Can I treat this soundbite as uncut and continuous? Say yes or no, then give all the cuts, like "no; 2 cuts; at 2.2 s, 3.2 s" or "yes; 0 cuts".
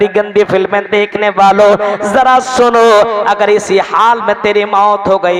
yes; 0 cuts